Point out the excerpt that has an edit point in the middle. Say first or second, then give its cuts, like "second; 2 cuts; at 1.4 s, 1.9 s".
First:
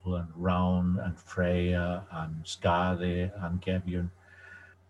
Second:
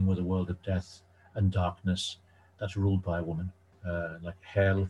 second; 1 cut; at 3.8 s